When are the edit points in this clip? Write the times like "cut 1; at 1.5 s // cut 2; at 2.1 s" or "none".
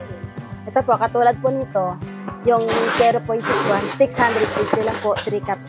none